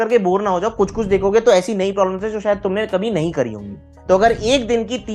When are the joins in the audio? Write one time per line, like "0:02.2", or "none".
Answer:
0:03.9